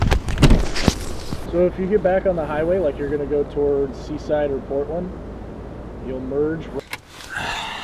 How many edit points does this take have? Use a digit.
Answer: 2